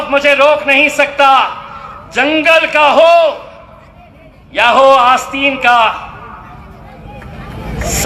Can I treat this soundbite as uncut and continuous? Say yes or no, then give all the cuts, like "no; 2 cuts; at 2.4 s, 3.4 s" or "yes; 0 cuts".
yes; 0 cuts